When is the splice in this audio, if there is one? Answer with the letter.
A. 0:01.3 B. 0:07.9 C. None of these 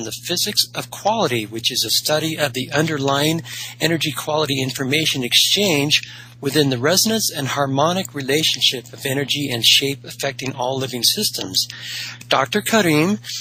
B